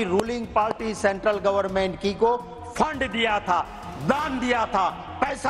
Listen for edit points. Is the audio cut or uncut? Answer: uncut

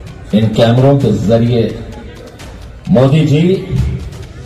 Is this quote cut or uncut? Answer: uncut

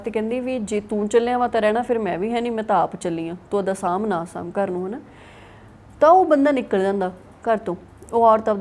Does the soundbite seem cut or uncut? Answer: uncut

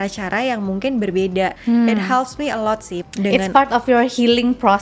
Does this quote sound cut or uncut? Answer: cut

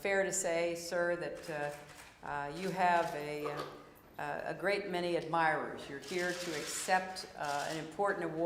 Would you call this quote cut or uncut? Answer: uncut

